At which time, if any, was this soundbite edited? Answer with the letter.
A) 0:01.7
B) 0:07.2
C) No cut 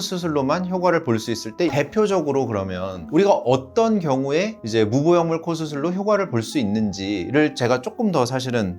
A